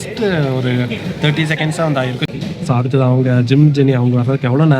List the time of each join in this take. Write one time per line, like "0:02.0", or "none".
0:02.3